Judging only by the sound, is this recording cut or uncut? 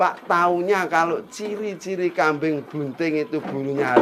uncut